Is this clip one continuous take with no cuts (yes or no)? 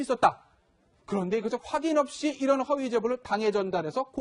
no